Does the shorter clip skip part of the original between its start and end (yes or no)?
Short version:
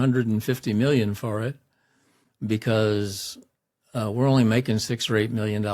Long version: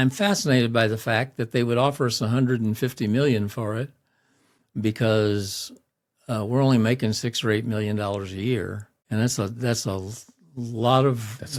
no